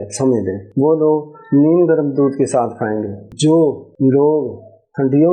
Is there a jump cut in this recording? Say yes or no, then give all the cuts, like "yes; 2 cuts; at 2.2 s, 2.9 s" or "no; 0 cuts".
no; 0 cuts